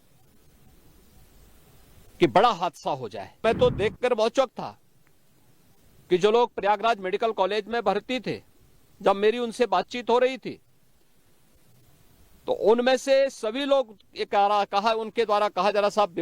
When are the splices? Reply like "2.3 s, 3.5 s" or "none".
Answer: 3.4 s